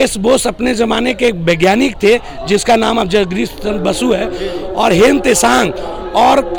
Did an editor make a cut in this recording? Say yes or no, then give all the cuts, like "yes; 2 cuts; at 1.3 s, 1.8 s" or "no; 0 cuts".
no; 0 cuts